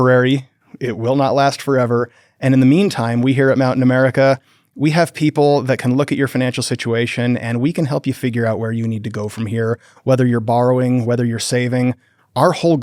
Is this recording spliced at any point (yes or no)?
no